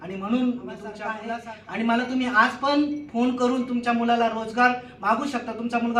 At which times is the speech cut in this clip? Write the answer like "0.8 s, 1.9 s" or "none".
1.2 s